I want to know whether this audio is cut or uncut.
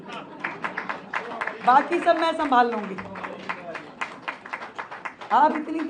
uncut